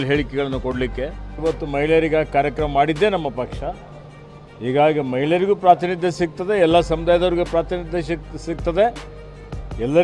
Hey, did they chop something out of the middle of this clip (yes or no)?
yes